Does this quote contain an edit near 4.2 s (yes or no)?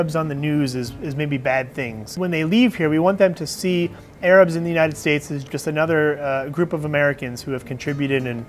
no